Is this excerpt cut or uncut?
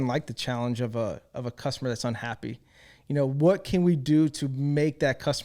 uncut